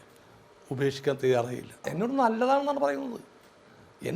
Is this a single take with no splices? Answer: no; 1 cut; at 1.9 s

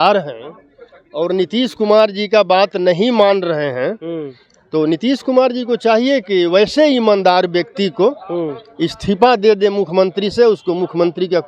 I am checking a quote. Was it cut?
no; 0 cuts

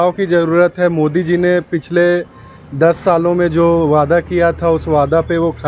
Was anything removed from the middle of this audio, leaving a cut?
no; 0 cuts

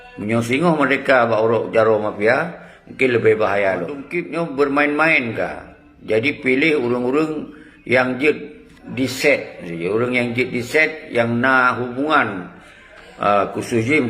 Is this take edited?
yes; 1 cut; at 4.1 s

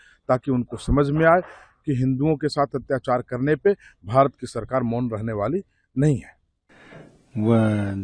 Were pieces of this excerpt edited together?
no; 0 cuts

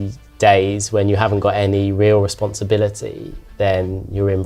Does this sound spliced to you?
no; 0 cuts

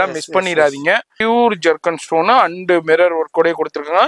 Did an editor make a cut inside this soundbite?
yes; 1 cut; at 1.1 s

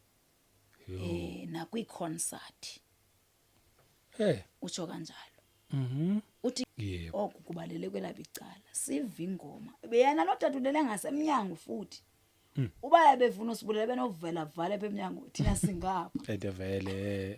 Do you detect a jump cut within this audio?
yes; 1 cut; at 6.7 s

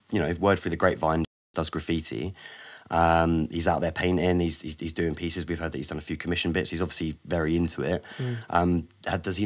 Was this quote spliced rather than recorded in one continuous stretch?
no; 0 cuts

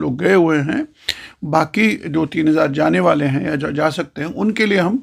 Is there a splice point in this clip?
no; 0 cuts

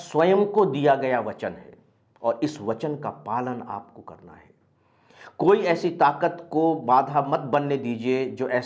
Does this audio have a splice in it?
no; 0 cuts

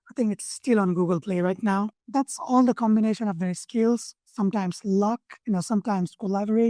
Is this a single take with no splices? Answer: no; 2 cuts; at 2.0 s, 5.3 s

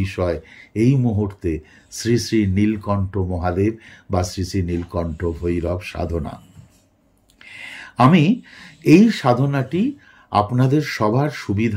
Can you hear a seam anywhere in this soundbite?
no; 0 cuts

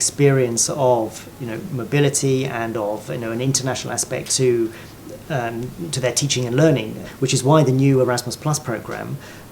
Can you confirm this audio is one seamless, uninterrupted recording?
yes; 0 cuts

